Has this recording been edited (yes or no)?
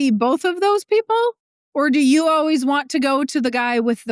yes